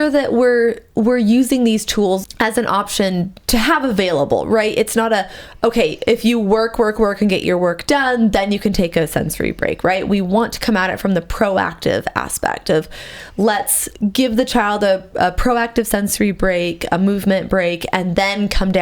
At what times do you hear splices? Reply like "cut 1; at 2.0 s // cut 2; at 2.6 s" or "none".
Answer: cut 1; at 2.2 s // cut 2; at 3.4 s